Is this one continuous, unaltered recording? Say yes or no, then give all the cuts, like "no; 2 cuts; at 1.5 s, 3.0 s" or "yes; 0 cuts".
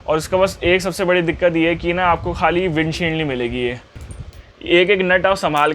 no; 1 cut; at 4.1 s